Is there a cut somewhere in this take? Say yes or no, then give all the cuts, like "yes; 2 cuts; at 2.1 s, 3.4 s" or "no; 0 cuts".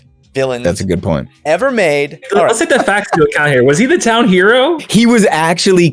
yes; 2 cuts; at 2.2 s, 4.8 s